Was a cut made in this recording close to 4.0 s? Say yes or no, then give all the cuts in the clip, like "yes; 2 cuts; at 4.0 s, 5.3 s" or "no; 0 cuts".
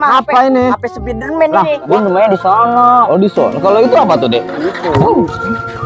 no; 1 cut; at 1.9 s